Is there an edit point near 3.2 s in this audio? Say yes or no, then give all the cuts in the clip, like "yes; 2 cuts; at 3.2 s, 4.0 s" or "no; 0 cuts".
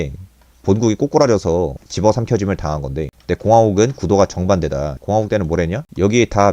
no; 2 cuts; at 1.8 s, 4.9 s